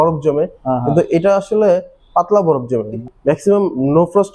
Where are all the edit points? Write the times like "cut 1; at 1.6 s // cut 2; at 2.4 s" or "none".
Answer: cut 1; at 3.1 s